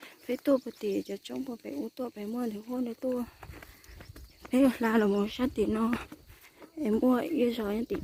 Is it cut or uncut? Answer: uncut